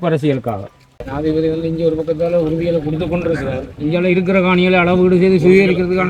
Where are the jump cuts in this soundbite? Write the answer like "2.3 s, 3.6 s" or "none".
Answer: 1.0 s